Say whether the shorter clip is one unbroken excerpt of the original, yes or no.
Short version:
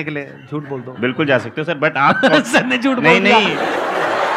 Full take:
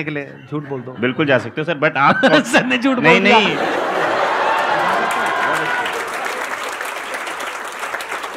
yes